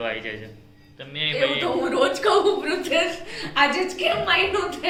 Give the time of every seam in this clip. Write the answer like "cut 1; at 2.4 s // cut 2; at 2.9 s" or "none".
none